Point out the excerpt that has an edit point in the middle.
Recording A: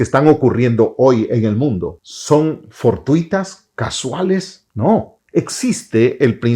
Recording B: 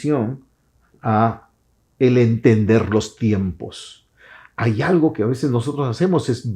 A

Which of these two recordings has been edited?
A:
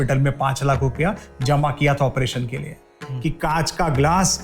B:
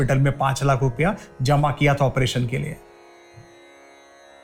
A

